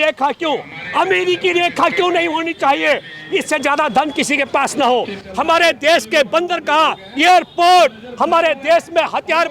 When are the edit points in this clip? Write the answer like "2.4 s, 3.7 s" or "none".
5.2 s

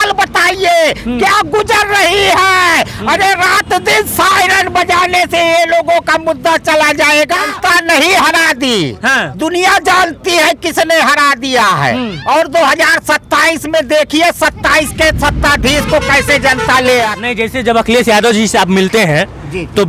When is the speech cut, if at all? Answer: 7.5 s, 17.2 s

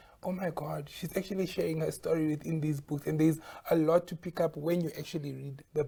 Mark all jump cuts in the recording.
none

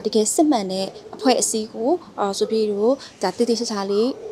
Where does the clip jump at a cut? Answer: none

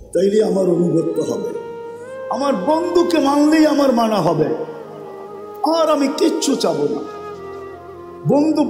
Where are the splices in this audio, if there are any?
none

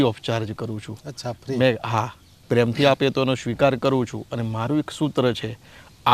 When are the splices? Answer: 2.4 s

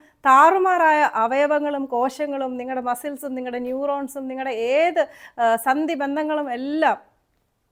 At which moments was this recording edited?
none

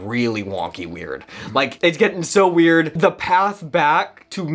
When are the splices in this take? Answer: 1.7 s, 2.9 s

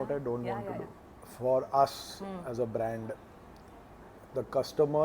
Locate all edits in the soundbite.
1.0 s

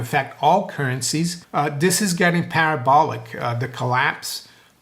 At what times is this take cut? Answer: 1.4 s

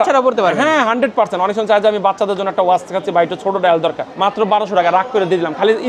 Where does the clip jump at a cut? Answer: 4.1 s

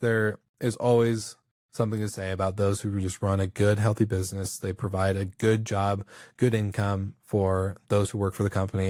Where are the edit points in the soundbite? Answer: none

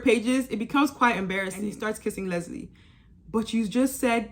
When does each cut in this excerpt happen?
1.7 s

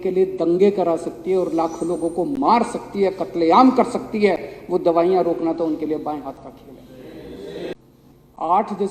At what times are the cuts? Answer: 7.7 s

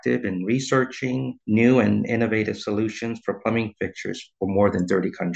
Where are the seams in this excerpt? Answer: 1.3 s

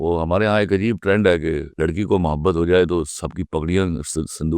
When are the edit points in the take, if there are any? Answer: 1.7 s

